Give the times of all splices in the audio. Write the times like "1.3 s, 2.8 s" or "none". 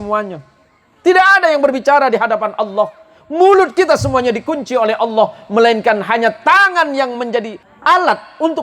7.6 s